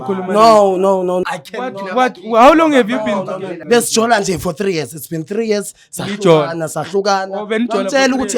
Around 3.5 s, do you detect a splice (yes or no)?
yes